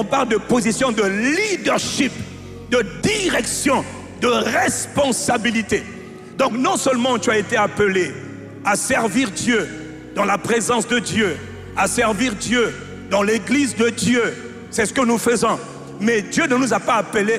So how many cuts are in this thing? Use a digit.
0